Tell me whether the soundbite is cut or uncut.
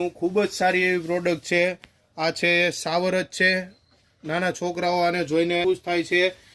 uncut